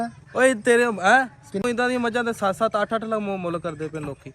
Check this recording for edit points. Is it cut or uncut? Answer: cut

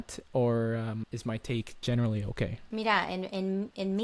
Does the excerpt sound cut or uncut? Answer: cut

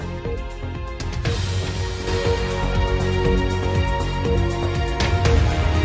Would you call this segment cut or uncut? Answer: cut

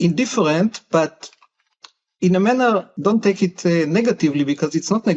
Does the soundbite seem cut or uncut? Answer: cut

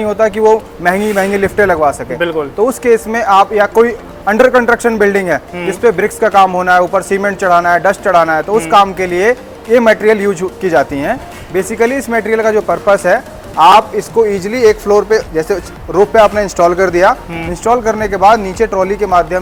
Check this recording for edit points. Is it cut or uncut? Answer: uncut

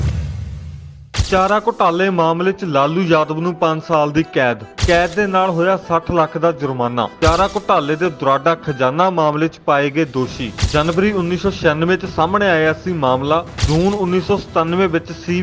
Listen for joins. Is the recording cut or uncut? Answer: cut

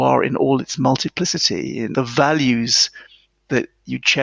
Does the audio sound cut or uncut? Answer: cut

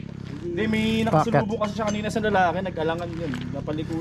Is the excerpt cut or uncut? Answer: uncut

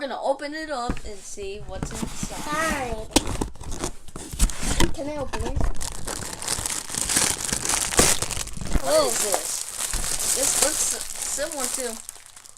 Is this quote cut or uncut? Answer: cut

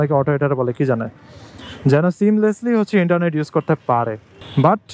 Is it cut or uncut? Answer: uncut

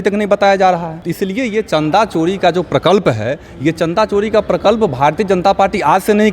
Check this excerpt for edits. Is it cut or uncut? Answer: cut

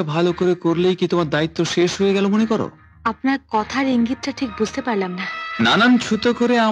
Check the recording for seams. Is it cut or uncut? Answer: uncut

